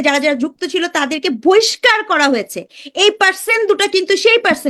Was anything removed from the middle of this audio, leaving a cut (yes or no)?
no